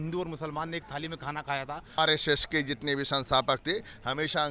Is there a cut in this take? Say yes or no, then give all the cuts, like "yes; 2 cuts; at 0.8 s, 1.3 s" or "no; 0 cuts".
yes; 1 cut; at 2.0 s